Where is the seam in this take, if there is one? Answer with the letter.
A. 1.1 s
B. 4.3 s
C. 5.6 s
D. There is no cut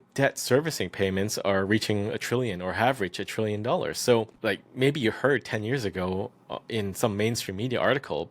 B